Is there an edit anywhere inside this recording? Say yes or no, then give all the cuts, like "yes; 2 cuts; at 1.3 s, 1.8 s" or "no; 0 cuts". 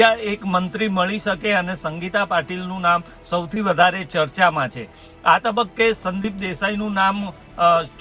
no; 0 cuts